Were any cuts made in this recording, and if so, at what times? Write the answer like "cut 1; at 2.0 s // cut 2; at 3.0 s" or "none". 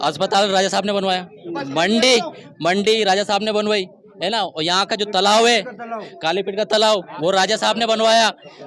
none